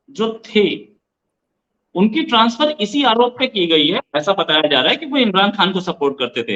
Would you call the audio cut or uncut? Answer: uncut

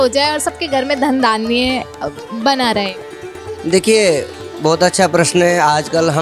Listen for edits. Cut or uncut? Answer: uncut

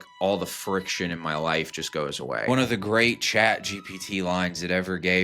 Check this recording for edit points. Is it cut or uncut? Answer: cut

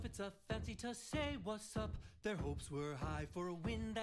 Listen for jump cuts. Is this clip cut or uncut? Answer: cut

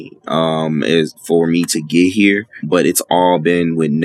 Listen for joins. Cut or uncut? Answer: cut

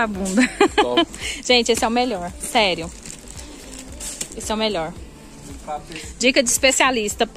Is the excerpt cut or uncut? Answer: uncut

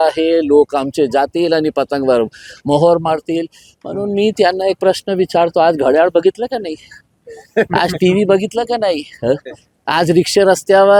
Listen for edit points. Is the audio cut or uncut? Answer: uncut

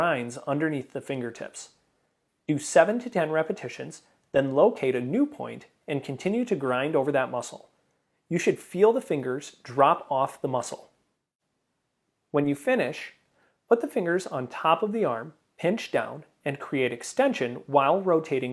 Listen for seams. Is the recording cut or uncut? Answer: uncut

